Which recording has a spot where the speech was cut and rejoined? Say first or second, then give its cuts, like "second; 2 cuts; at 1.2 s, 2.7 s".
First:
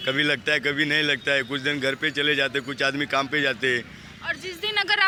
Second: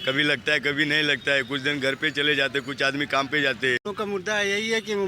second; 1 cut; at 3.9 s